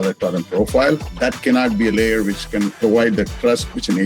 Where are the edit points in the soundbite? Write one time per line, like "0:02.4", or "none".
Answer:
0:01.1
0:02.8